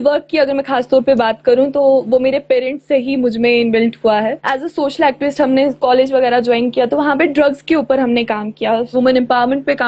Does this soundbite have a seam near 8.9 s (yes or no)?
yes